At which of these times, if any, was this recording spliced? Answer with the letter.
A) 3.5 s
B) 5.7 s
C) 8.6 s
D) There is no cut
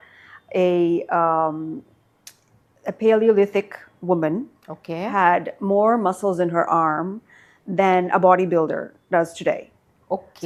D